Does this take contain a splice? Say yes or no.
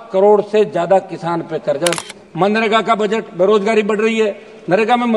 yes